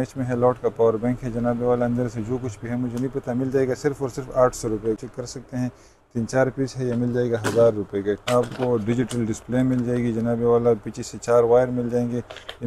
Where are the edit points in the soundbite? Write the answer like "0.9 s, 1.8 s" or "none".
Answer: 5.0 s, 8.2 s